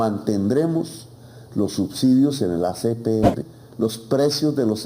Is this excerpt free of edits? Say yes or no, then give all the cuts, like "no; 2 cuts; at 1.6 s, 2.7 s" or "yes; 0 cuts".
no; 1 cut; at 3.6 s